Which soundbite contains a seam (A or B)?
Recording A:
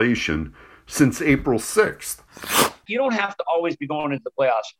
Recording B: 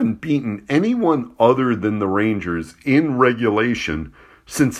A